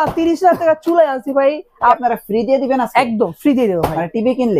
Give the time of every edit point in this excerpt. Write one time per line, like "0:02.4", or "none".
0:02.0